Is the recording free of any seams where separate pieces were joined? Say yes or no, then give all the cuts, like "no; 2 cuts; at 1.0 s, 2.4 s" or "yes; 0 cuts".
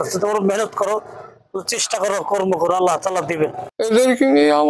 no; 1 cut; at 3.7 s